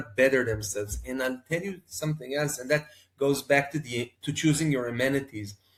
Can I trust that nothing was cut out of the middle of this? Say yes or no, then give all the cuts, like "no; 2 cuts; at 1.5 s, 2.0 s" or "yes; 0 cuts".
yes; 0 cuts